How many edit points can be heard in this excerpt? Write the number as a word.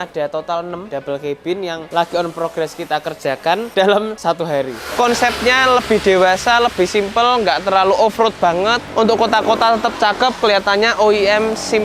four